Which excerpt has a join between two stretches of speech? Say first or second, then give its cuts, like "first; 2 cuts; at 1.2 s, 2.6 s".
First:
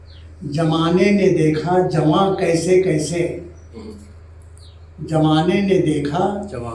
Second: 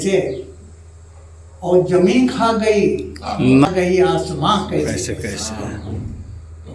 second; 1 cut; at 3.4 s